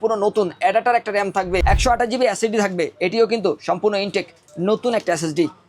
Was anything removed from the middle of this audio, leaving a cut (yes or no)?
yes